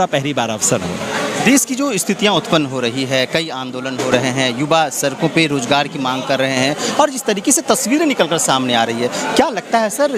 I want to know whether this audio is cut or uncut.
uncut